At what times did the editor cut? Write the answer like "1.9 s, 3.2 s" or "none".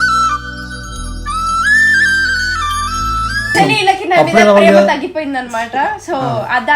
3.5 s